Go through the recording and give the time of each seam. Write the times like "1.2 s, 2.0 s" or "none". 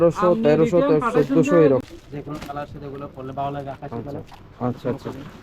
1.8 s